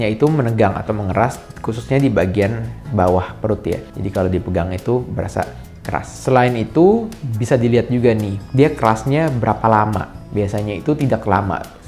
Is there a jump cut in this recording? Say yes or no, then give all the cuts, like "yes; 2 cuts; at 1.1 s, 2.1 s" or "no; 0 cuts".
no; 0 cuts